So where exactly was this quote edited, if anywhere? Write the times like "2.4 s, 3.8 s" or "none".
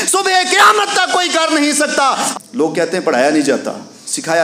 2.3 s